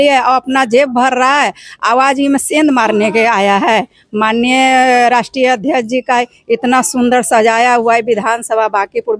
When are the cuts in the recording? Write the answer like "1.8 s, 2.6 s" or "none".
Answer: none